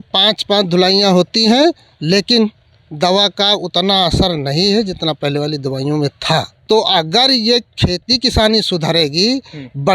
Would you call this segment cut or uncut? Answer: cut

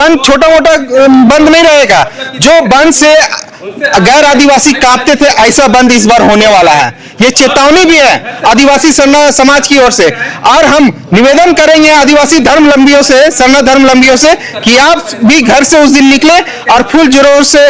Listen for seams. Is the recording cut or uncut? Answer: uncut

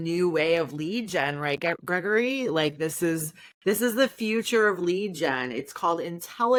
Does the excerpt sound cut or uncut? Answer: uncut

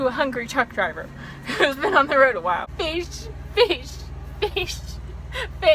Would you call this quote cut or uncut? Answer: cut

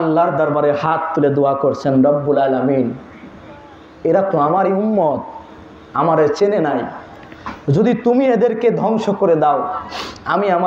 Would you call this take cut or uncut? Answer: uncut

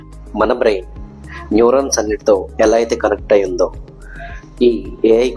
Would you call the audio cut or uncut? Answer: cut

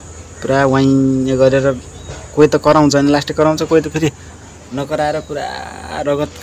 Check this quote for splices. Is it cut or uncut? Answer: uncut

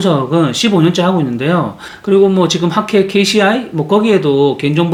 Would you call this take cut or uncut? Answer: uncut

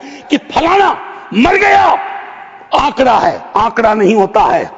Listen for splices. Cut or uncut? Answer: uncut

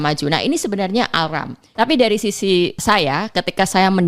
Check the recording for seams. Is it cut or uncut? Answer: cut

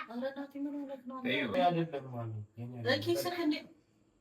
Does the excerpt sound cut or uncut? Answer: cut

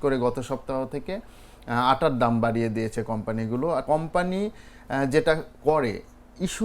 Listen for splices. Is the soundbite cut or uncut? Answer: cut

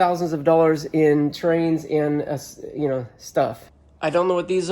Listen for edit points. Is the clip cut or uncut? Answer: cut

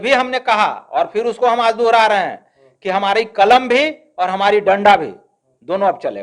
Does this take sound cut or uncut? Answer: uncut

